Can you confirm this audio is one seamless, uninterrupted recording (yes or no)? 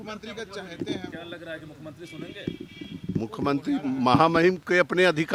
yes